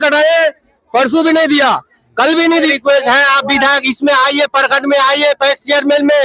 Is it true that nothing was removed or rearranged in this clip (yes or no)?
no